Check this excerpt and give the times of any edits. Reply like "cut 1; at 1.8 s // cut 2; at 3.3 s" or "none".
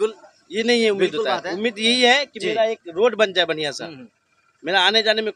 none